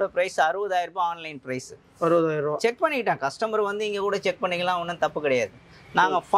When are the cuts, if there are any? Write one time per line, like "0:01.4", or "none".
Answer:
none